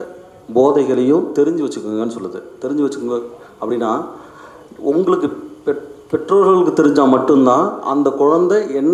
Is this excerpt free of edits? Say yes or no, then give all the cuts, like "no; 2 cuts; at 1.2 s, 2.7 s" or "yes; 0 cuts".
yes; 0 cuts